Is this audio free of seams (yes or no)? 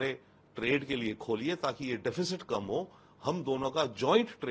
yes